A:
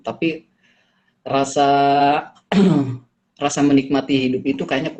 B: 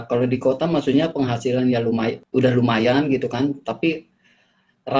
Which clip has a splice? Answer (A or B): B